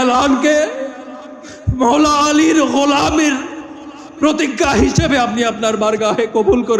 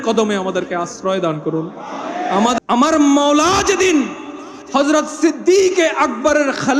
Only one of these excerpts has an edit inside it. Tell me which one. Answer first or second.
second